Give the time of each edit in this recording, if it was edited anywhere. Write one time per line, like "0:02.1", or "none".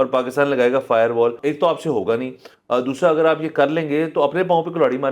0:01.4

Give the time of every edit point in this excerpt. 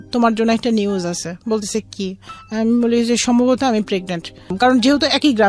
0:04.5

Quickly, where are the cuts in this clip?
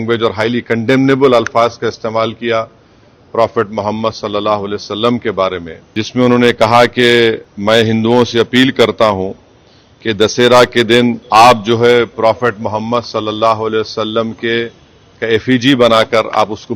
0:05.7
0:07.5
0:11.2

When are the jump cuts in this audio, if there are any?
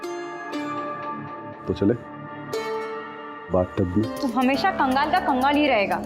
0:04.1

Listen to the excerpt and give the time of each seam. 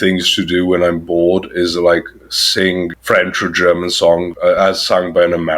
0:02.9
0:04.3

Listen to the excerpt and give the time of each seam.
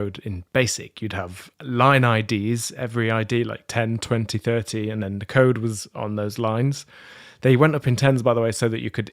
0:01.5

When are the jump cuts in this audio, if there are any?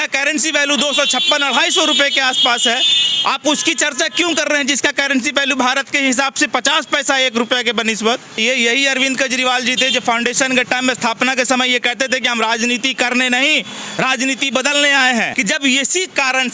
0:08.4
0:15.3

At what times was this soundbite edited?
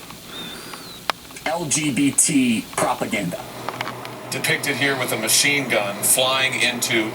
0:03.6

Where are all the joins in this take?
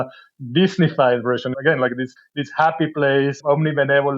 0:01.5
0:02.2
0:03.4

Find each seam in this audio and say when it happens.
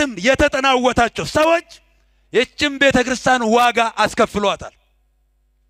none

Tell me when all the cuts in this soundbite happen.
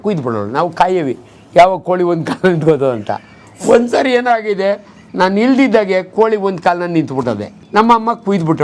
0:07.5

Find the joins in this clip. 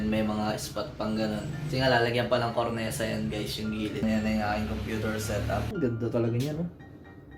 0:04.0
0:05.7

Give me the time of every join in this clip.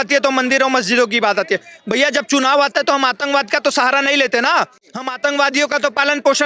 none

